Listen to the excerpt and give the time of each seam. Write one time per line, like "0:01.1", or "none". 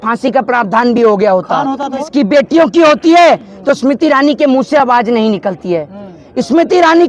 0:02.1